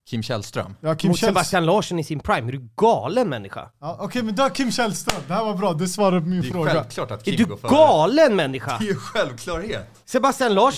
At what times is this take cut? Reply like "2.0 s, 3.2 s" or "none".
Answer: none